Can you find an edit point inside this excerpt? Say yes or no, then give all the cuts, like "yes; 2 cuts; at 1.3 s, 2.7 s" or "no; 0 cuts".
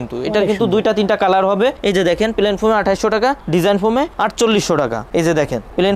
yes; 3 cuts; at 1.8 s, 4.1 s, 5.1 s